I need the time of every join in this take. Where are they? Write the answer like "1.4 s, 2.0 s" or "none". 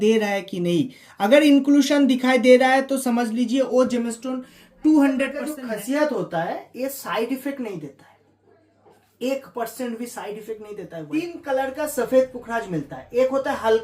5.5 s, 11.0 s